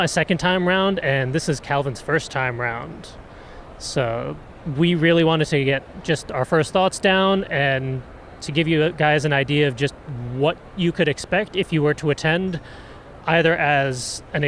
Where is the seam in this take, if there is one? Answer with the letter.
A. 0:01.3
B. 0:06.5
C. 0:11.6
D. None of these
A